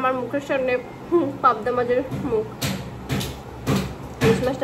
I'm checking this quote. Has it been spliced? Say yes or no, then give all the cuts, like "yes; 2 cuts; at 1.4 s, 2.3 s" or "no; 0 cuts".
no; 0 cuts